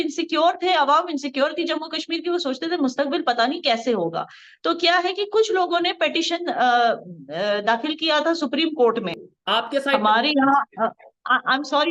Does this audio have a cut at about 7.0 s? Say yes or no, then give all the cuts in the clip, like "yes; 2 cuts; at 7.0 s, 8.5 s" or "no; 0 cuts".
no; 1 cut; at 9.3 s